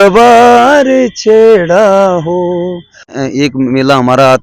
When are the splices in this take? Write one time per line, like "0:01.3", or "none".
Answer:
0:03.1